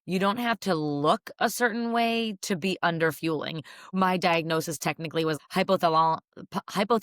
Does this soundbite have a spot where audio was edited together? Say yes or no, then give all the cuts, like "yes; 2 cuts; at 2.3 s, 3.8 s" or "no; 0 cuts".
yes; 2 cuts; at 3.9 s, 5.4 s